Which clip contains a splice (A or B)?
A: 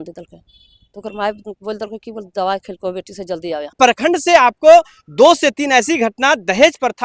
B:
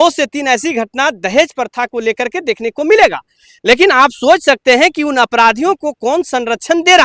A